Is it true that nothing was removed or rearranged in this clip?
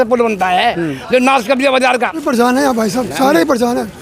no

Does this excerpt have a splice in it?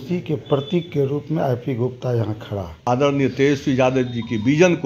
yes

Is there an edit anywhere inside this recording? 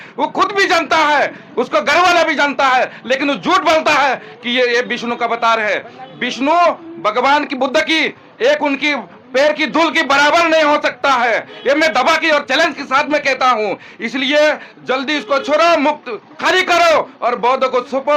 no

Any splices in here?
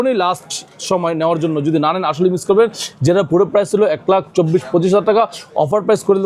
no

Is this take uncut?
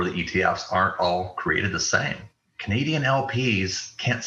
no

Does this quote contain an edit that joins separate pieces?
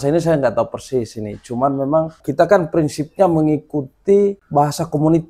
yes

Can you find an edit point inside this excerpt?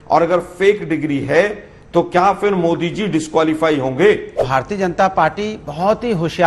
yes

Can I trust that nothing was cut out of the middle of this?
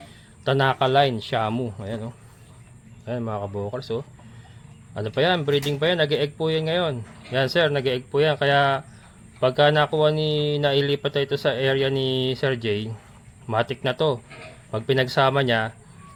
yes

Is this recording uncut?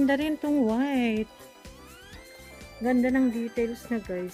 yes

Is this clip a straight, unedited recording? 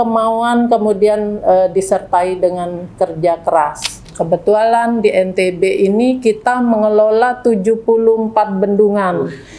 no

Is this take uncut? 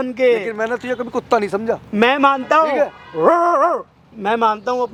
yes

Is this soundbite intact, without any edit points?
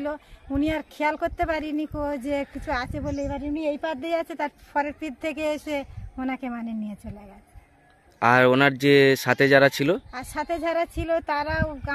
yes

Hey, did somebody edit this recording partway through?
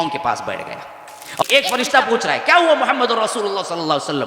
yes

